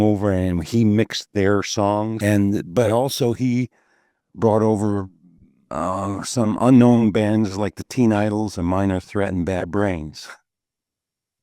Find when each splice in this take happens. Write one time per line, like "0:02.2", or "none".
0:02.1